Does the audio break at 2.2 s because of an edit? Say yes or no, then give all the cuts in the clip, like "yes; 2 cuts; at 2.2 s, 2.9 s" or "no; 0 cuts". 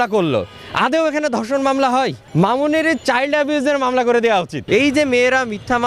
yes; 2 cuts; at 2.2 s, 4.6 s